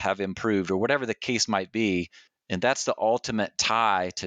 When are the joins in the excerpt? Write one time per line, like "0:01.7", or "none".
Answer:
none